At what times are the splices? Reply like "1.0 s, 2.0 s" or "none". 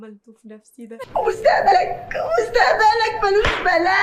none